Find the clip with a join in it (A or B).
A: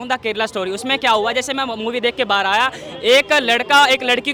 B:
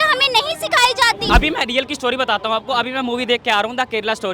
B